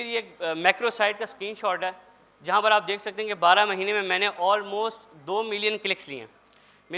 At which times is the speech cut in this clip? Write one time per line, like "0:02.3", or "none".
none